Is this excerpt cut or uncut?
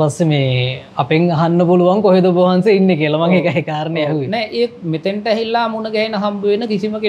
uncut